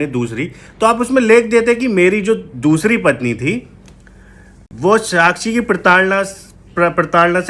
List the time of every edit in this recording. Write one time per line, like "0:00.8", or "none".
none